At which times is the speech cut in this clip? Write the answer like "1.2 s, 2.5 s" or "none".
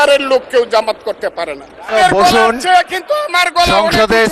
1.9 s